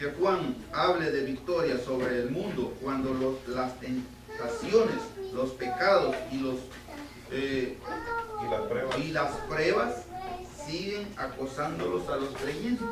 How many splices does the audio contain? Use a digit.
0